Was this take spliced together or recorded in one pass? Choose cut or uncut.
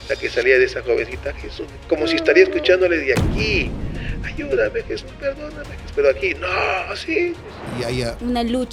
uncut